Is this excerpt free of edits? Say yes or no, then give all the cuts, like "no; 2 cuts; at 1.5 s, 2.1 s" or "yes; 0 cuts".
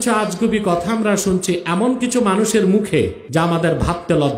no; 1 cut; at 3.2 s